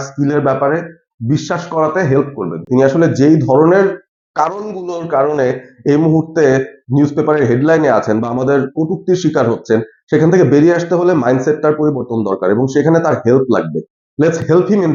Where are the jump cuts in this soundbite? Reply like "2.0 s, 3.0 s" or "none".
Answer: none